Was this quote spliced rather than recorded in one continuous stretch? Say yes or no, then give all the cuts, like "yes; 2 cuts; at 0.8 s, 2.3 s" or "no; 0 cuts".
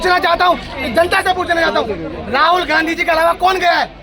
no; 0 cuts